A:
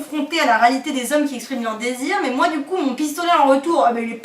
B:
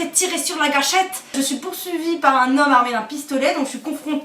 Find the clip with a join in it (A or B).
B